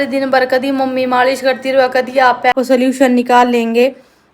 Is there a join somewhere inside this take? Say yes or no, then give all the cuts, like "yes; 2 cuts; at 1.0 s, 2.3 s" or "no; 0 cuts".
yes; 1 cut; at 2.5 s